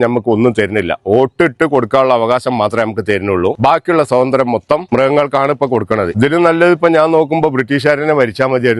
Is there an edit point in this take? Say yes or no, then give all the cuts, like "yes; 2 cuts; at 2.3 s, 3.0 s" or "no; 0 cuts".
yes; 3 cuts; at 3.6 s, 4.8 s, 6.1 s